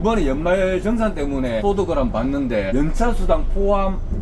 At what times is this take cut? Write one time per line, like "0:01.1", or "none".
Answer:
none